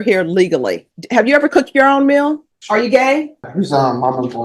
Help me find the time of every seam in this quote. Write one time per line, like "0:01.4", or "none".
0:00.9
0:02.5
0:03.5